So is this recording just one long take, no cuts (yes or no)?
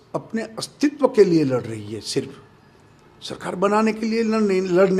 yes